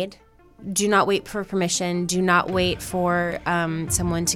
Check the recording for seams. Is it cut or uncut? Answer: uncut